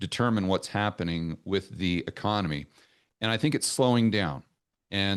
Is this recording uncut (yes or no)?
yes